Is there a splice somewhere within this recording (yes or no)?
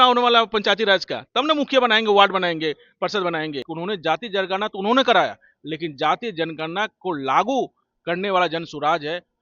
yes